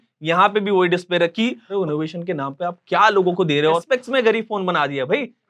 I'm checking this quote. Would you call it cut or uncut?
cut